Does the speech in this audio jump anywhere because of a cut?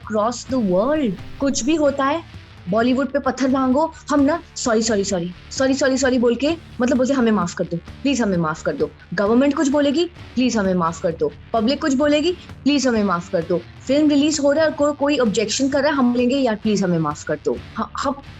yes; 1 cut; at 1.3 s

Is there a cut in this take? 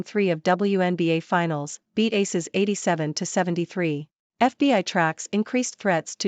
yes; 1 cut; at 4.2 s

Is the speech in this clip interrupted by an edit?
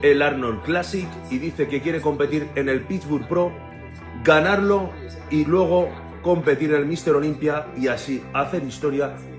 no; 0 cuts

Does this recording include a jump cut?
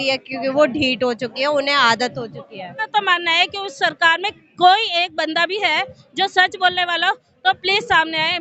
yes; 1 cut; at 2.8 s

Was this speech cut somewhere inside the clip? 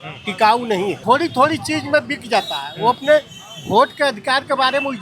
yes; 1 cut; at 1.0 s

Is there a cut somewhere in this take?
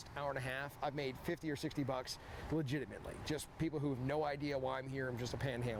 no; 0 cuts

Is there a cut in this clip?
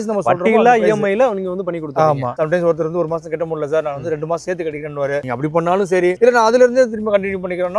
yes; 2 cuts; at 2.4 s, 5.8 s

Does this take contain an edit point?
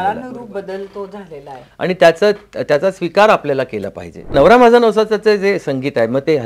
yes; 1 cut; at 4.3 s

